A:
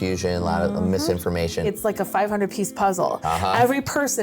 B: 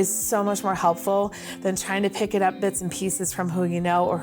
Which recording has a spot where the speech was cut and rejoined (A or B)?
A